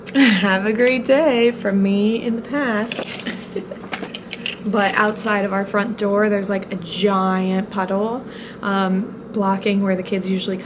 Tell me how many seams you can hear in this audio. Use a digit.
0